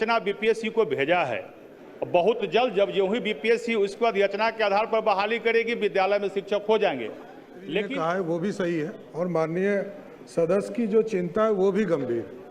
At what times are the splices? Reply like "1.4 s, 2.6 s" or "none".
7.9 s